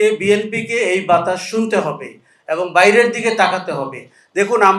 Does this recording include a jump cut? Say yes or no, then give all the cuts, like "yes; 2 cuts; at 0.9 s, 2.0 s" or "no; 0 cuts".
no; 0 cuts